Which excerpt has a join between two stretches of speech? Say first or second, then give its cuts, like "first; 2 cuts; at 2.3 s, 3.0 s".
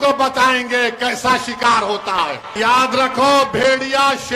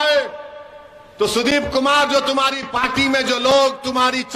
first; 1 cut; at 2.6 s